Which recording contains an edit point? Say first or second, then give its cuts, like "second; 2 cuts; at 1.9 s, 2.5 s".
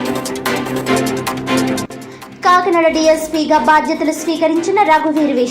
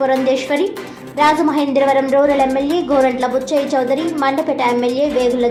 first; 1 cut; at 1.8 s